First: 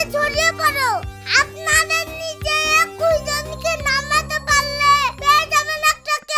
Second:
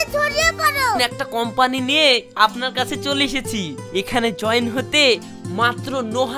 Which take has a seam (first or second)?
second